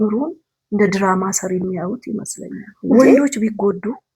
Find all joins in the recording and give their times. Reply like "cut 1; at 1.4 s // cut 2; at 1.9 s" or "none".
cut 1; at 3.0 s